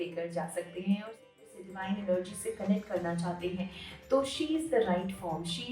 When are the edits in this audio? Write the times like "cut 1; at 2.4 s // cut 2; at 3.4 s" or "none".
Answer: cut 1; at 1.5 s